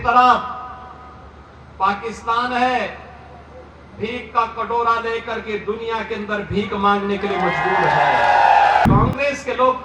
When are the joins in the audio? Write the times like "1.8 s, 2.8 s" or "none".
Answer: 8.9 s